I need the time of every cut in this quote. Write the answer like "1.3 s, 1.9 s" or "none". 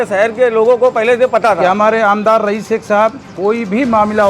1.6 s